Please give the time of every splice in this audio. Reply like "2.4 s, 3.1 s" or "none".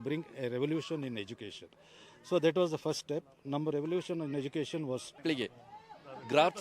5.2 s